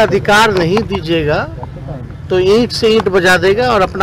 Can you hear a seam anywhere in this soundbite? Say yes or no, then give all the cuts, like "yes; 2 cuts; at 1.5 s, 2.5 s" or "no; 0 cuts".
no; 0 cuts